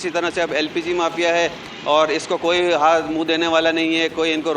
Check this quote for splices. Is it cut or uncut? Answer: uncut